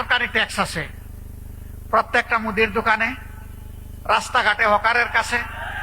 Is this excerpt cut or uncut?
uncut